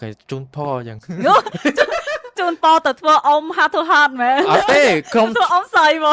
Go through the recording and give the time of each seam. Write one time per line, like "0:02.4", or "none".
none

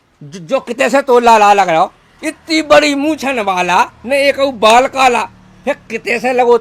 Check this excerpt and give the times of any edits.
none

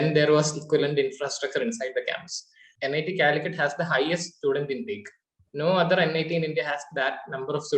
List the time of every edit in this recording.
0:02.7

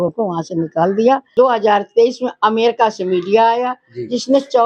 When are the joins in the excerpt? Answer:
0:01.3

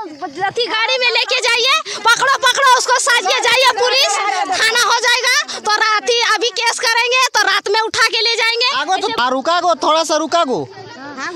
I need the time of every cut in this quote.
0:09.1

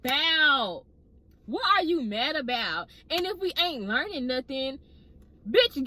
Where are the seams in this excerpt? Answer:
none

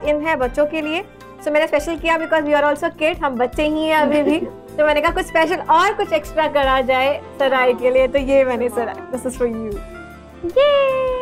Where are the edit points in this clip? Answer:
none

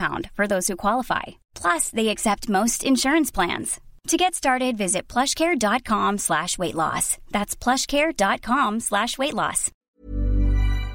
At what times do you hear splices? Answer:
0:09.9

